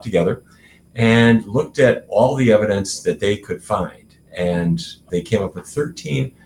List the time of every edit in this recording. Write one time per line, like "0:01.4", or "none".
0:05.0